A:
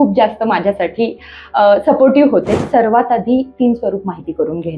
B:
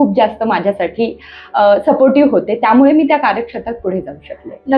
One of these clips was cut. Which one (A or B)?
A